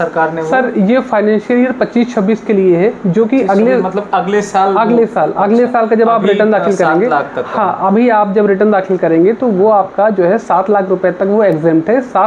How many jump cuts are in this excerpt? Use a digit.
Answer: 0